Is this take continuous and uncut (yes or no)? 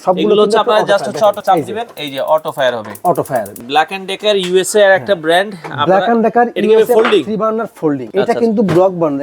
no